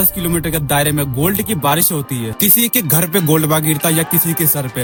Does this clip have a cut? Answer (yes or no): no